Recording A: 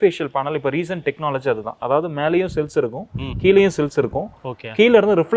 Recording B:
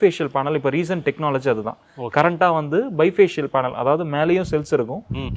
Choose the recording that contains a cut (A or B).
A